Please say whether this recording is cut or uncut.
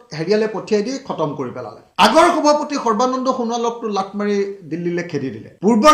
uncut